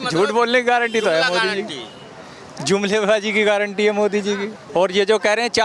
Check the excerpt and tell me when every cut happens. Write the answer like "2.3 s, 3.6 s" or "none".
4.6 s